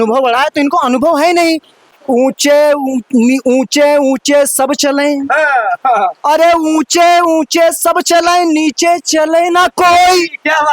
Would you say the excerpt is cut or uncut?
cut